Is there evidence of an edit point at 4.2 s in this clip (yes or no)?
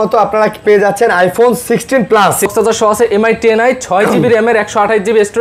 no